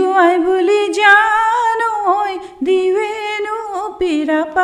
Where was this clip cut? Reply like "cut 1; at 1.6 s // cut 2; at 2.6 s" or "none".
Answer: none